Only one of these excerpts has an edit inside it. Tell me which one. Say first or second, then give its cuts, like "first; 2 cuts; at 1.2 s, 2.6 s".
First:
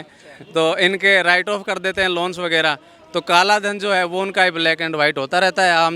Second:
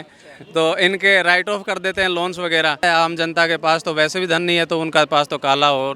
second; 1 cut; at 2.8 s